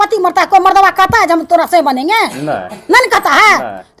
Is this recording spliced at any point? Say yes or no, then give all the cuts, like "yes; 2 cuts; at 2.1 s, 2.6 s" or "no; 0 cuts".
no; 0 cuts